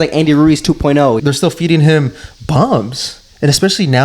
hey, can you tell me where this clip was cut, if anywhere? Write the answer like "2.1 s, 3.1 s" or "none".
1.2 s